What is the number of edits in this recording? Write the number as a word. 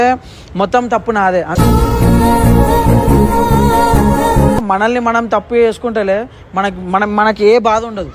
one